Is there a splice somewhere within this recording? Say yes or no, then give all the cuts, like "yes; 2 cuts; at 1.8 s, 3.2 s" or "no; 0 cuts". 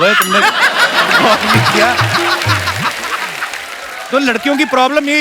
no; 0 cuts